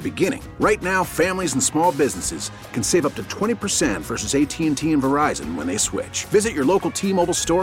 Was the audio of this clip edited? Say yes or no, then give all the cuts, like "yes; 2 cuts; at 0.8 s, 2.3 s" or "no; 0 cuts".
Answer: no; 0 cuts